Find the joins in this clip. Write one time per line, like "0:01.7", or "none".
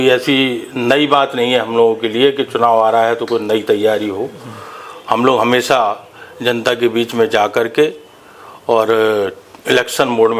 none

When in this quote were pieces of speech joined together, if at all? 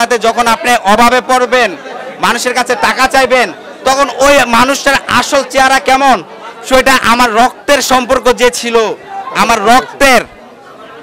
none

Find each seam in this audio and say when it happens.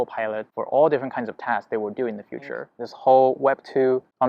0:02.8

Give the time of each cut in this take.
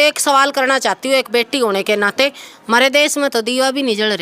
0:02.8

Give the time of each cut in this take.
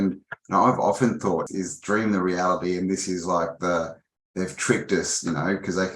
0:01.5

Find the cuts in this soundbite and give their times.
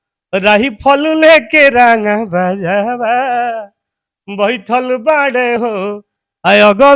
none

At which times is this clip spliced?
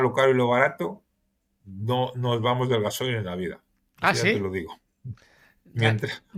none

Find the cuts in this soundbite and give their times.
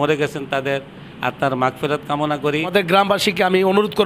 0:02.7

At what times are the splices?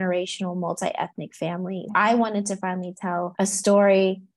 0:01.8
0:03.3

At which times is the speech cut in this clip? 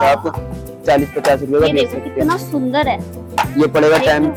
none

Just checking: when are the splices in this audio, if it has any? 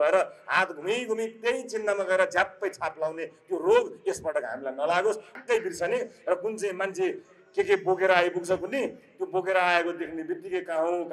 0:05.4

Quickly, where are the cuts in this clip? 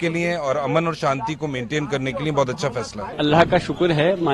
0:03.1

